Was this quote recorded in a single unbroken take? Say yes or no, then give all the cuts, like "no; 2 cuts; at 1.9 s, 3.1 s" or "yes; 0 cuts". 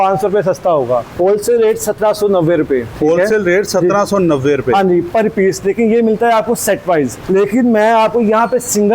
no; 3 cuts; at 1.1 s, 2.9 s, 7.2 s